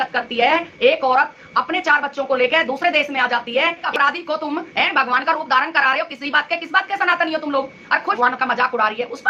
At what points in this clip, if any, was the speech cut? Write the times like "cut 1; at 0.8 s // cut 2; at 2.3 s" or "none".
cut 1; at 3.9 s // cut 2; at 8.2 s